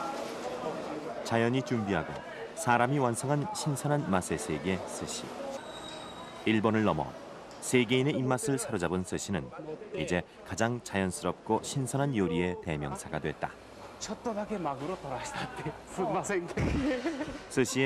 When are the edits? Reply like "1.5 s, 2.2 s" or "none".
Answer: none